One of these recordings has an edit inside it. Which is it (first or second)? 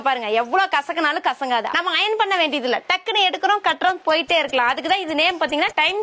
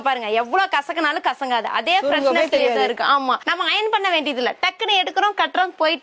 first